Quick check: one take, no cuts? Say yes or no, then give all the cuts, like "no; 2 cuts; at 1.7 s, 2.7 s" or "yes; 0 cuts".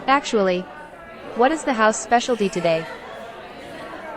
no; 1 cut; at 2.8 s